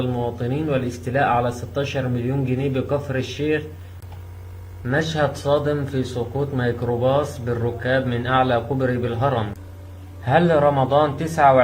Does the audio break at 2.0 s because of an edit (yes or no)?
no